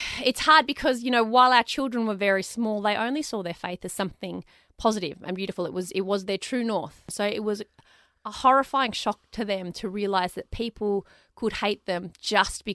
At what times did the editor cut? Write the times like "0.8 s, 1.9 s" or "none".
7.1 s